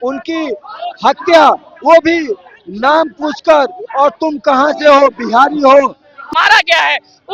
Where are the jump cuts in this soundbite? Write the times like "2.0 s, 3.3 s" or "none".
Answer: 6.3 s